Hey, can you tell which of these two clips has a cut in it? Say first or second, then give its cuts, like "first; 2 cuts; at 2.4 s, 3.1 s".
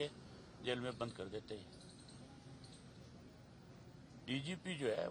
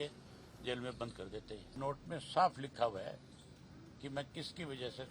second; 1 cut; at 1.8 s